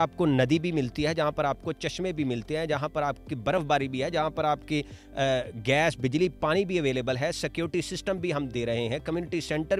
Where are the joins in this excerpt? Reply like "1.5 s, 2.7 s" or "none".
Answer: none